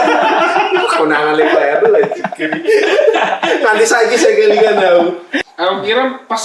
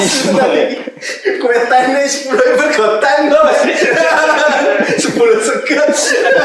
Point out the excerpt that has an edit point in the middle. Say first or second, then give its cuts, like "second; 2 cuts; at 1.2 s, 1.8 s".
first; 1 cut; at 5.3 s